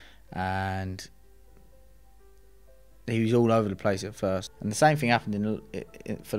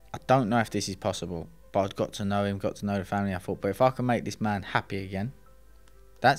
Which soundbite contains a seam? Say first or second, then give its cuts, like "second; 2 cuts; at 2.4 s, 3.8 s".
first; 1 cut; at 4.5 s